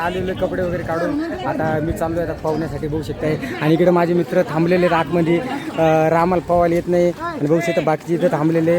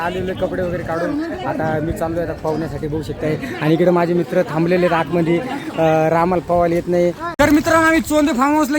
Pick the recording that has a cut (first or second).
second